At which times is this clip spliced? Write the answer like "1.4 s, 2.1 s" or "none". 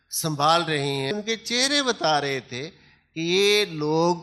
1.1 s

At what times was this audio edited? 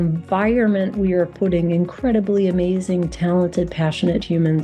none

